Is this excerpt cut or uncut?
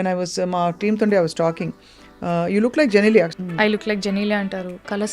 cut